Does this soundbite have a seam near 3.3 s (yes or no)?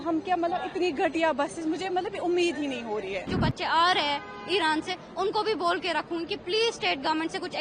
yes